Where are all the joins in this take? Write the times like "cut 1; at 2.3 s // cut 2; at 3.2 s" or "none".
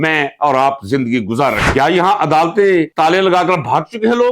cut 1; at 1.7 s